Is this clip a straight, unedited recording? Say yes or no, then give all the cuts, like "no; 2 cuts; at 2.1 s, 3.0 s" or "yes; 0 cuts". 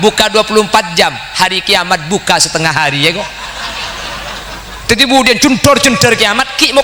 yes; 0 cuts